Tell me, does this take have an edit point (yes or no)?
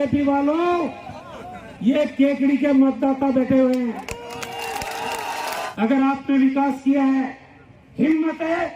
yes